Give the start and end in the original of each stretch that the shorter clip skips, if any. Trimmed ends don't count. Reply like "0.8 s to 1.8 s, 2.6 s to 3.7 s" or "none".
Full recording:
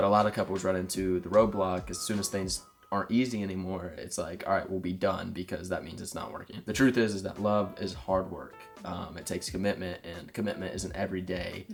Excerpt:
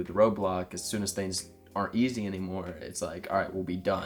none